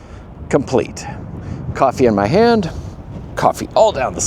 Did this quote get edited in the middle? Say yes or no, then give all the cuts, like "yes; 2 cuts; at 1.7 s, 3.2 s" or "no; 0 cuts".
no; 0 cuts